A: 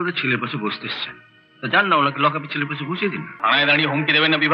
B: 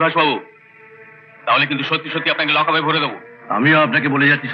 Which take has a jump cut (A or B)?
A